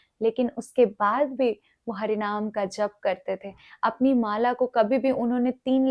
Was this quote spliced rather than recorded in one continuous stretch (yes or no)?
no